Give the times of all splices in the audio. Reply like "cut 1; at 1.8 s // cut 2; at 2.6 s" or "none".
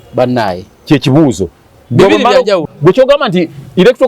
cut 1; at 2.6 s